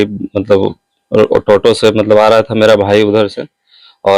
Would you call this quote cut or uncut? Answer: uncut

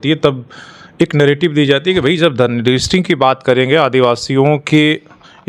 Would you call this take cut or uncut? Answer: uncut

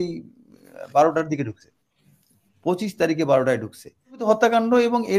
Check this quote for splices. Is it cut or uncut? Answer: cut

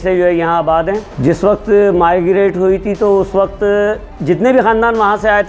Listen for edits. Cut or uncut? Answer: cut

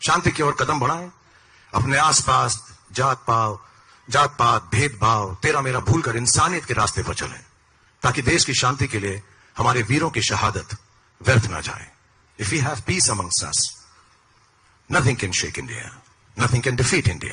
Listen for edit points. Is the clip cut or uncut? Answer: uncut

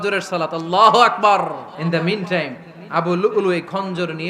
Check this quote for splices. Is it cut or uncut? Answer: cut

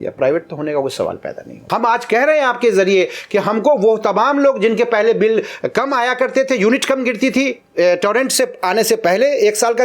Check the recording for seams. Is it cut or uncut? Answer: cut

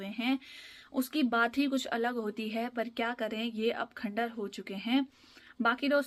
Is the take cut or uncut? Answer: uncut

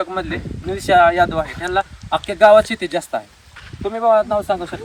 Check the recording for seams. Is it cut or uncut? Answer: uncut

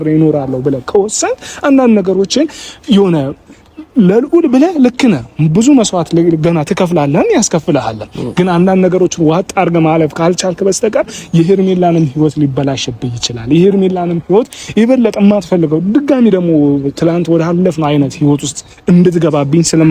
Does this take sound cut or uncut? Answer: uncut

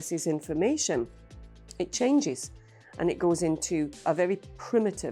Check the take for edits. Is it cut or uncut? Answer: uncut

